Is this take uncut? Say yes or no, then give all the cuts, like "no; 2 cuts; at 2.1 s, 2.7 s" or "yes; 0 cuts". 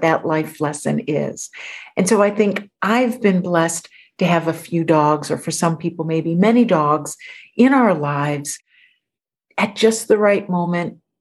yes; 0 cuts